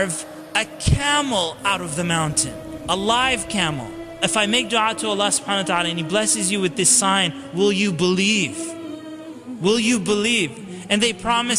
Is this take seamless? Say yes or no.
no